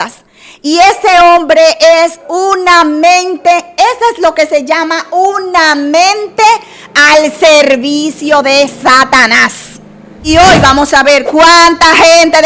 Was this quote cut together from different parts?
yes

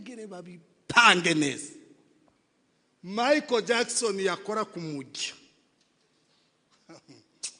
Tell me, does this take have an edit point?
no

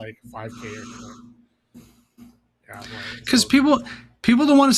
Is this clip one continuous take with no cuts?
yes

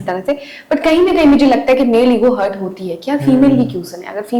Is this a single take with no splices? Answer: yes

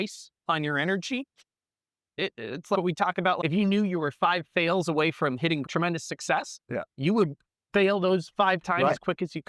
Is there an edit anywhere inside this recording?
yes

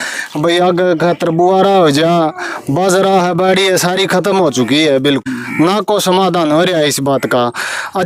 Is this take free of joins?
no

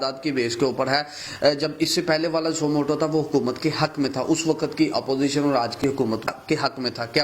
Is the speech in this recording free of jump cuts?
no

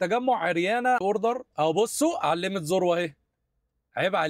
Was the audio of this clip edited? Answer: yes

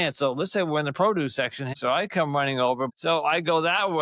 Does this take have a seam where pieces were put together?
yes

